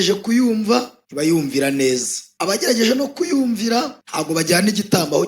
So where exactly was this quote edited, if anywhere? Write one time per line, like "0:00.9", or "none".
none